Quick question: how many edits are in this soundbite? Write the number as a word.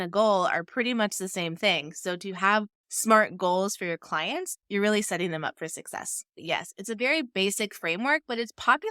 one